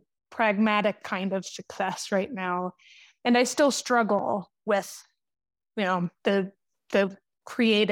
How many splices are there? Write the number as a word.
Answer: zero